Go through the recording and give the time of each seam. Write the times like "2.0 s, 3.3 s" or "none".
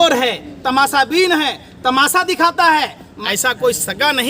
3.1 s